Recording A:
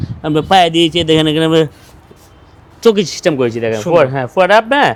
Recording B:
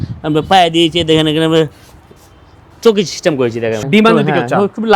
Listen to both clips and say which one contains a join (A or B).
B